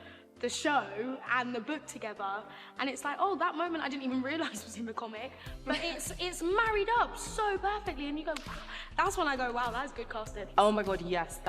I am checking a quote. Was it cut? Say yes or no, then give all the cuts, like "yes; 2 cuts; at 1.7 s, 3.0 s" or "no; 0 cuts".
yes; 1 cut; at 10.4 s